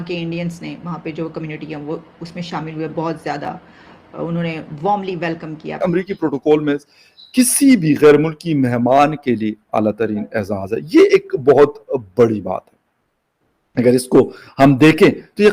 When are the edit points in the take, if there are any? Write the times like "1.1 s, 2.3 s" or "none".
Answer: 5.7 s